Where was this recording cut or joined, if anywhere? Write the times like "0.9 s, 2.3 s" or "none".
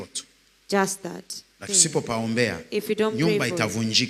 1.6 s